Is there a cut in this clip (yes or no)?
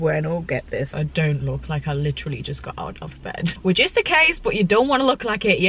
yes